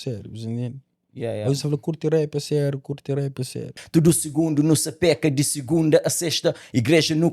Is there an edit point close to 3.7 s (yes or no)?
yes